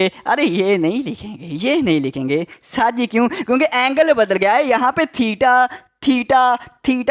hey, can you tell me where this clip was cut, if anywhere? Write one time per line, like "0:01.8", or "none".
none

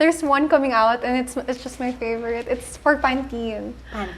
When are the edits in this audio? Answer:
none

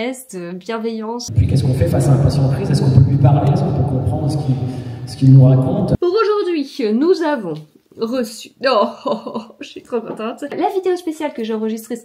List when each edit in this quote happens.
0:01.3
0:06.0
0:10.5

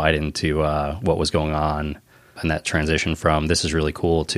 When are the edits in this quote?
none

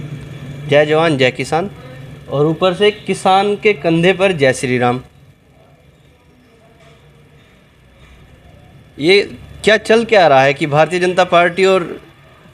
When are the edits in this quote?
none

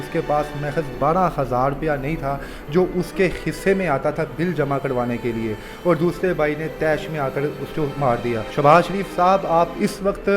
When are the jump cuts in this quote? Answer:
0:08.5

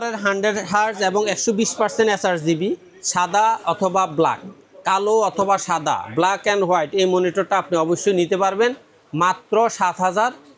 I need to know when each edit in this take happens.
none

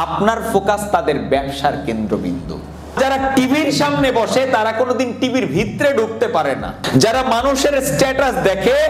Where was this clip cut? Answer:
0:02.9
0:06.8

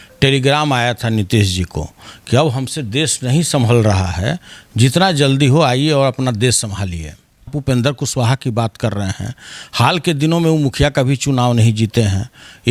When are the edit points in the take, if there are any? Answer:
0:07.5

